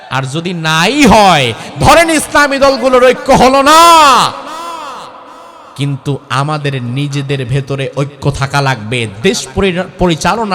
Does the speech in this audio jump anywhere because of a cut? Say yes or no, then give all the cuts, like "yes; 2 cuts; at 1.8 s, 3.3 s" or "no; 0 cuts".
no; 0 cuts